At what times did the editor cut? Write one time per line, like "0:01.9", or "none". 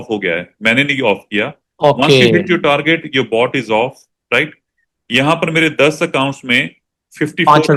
none